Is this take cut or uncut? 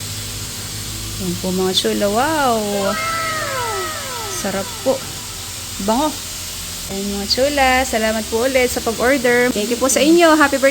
cut